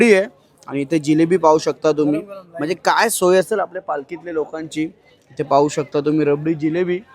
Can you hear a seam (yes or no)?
no